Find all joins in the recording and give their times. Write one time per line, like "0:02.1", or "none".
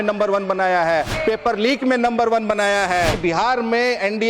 0:01.1
0:03.2